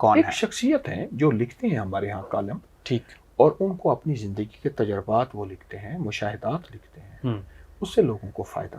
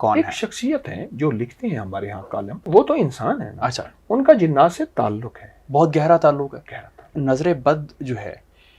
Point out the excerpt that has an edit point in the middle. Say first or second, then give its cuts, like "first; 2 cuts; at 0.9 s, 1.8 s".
second; 2 cuts; at 2.5 s, 7.1 s